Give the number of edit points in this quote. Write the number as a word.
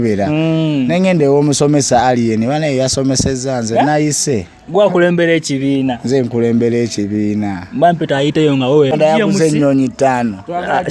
one